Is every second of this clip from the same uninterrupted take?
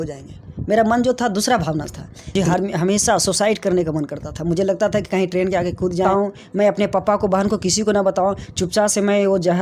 no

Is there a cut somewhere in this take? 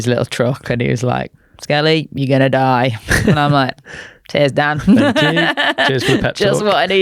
no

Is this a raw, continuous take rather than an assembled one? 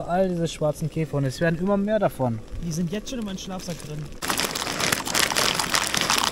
yes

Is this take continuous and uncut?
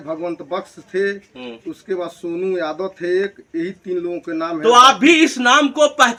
yes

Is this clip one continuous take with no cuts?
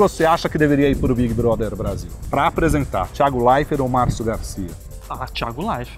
yes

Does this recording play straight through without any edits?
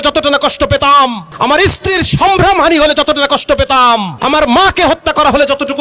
no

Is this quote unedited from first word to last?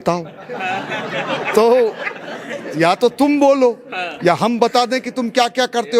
yes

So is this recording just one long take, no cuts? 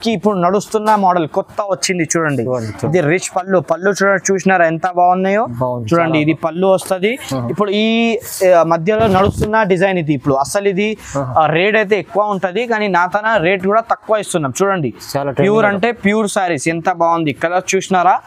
yes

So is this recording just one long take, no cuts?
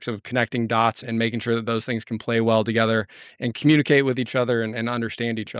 yes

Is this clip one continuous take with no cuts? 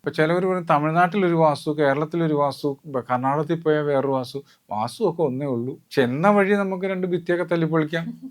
no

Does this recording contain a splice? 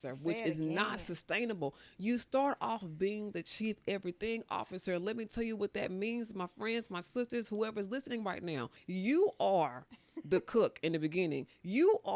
yes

